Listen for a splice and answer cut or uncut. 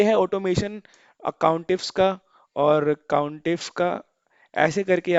uncut